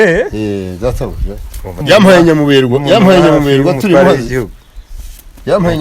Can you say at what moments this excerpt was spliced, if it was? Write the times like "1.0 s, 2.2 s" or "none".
1.8 s